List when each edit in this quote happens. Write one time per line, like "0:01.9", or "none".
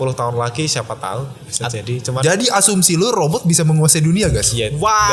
none

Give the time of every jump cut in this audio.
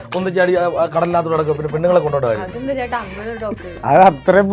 0:03.6

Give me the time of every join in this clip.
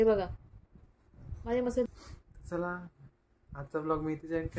0:01.9

